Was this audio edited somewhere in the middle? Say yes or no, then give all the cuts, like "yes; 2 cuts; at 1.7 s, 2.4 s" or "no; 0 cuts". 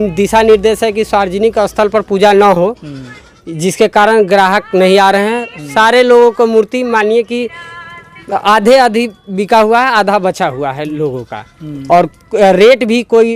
no; 0 cuts